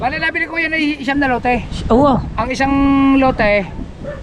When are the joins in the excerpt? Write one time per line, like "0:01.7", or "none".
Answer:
none